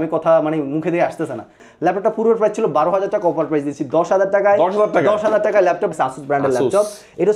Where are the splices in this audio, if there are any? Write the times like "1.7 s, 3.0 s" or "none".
1.6 s, 5.9 s